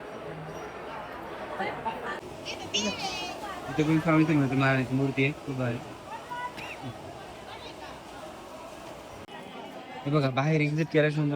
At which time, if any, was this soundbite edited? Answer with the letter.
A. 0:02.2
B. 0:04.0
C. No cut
A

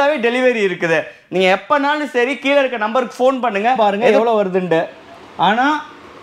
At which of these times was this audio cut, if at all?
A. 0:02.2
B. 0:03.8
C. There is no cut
B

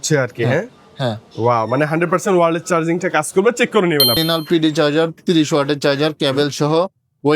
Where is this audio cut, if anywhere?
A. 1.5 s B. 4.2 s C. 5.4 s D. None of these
B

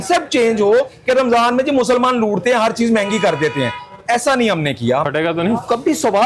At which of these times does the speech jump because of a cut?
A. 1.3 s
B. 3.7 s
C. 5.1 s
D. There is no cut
C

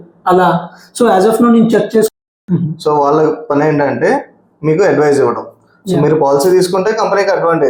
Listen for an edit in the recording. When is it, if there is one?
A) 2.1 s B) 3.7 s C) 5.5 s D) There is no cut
A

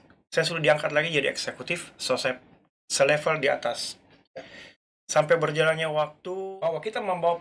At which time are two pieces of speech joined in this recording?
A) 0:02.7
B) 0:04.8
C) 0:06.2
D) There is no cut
C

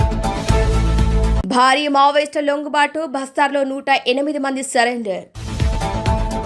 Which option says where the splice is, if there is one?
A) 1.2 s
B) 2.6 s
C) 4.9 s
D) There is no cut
A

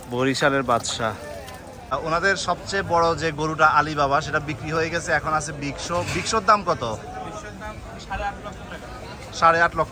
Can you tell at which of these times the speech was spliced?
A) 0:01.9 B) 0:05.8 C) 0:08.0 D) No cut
A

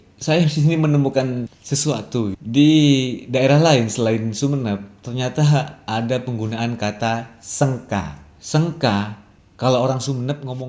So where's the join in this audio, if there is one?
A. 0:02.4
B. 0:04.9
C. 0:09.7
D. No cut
D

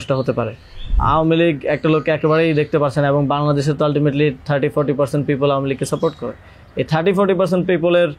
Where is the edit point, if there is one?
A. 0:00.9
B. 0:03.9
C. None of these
A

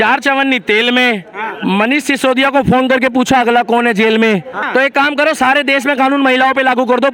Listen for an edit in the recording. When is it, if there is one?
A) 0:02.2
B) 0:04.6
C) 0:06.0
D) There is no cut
B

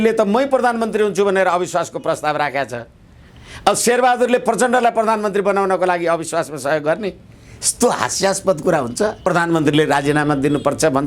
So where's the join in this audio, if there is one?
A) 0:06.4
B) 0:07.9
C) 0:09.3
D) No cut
C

